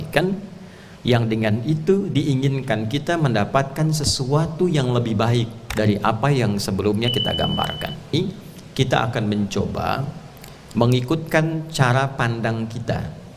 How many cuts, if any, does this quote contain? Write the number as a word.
one